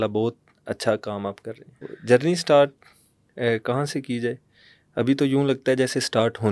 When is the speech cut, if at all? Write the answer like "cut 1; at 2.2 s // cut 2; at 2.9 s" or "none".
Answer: cut 1; at 1.9 s